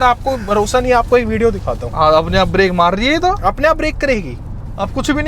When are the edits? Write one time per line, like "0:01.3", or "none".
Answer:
none